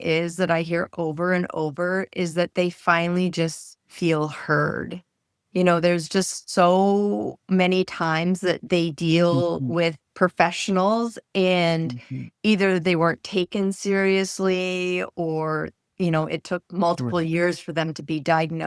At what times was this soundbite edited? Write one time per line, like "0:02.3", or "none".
none